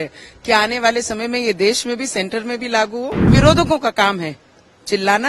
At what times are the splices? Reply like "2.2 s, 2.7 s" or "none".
3.3 s